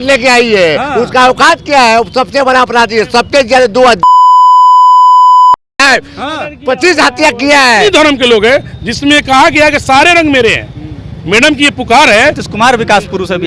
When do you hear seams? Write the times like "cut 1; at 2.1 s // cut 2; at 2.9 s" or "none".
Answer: cut 1; at 7.8 s // cut 2; at 12.4 s